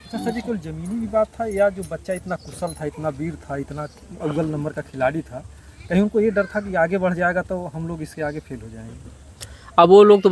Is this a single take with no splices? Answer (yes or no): yes